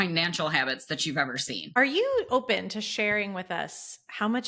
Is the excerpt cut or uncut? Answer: cut